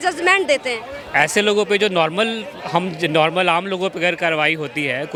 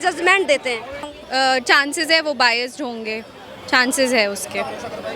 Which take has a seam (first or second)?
second